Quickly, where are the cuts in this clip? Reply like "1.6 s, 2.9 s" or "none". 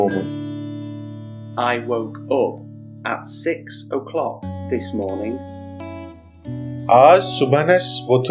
none